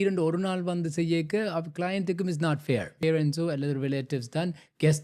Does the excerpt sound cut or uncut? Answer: cut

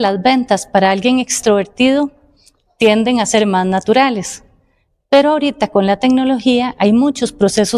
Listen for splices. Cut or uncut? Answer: uncut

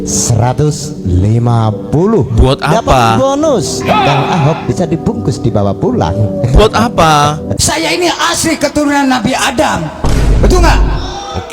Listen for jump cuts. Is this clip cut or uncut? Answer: cut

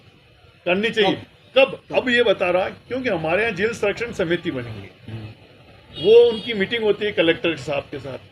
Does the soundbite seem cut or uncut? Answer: uncut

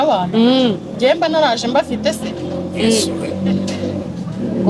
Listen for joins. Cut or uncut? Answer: uncut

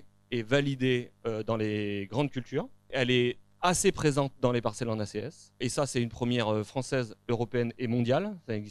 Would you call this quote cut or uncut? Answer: cut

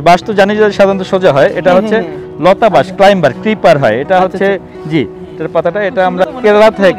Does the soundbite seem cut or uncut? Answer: uncut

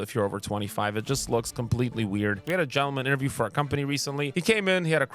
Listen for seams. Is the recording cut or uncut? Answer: cut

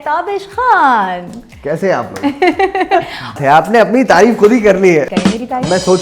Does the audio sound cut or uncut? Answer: cut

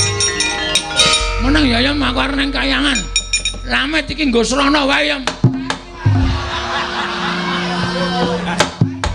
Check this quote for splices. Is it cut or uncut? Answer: cut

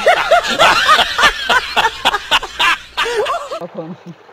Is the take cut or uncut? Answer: uncut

